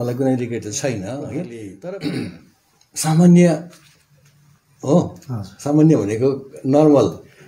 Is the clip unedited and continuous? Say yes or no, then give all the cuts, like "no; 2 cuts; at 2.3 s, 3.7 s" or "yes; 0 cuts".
no; 1 cut; at 1.6 s